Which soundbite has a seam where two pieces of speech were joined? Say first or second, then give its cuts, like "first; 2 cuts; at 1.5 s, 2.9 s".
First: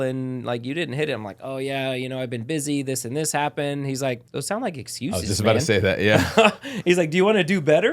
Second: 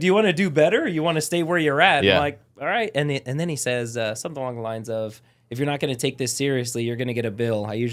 first; 1 cut; at 4.3 s